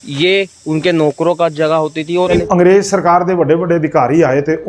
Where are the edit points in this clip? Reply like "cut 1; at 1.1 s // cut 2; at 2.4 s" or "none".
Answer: cut 1; at 2.3 s